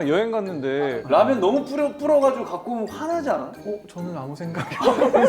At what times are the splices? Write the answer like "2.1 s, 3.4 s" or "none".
1.0 s, 3.5 s